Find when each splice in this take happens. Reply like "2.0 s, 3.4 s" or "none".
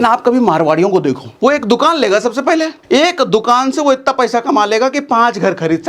1.3 s, 2.8 s